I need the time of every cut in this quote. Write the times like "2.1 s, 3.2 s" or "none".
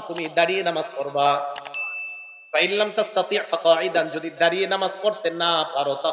none